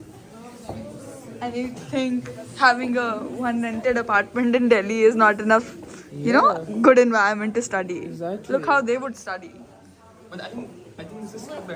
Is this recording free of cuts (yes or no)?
yes